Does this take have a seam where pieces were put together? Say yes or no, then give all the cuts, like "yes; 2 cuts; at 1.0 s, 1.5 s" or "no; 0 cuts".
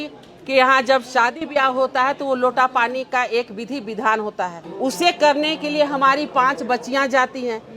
no; 0 cuts